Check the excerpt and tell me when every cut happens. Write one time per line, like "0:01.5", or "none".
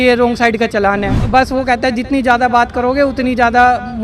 0:01.2